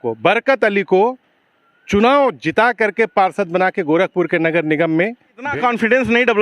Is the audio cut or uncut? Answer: cut